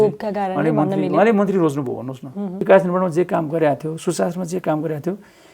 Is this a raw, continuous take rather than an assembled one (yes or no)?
no